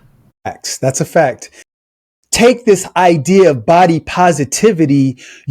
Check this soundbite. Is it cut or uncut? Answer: cut